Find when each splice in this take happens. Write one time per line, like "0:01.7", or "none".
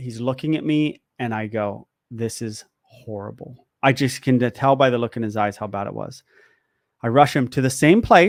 none